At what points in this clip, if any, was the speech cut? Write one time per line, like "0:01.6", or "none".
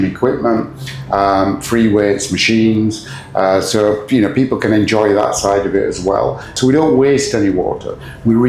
0:06.5